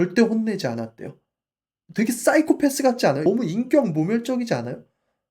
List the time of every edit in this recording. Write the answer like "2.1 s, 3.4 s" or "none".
3.3 s